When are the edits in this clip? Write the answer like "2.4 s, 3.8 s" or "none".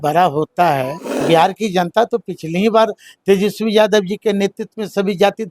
1.1 s